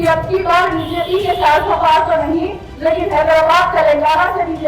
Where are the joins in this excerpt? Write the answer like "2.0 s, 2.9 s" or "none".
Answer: none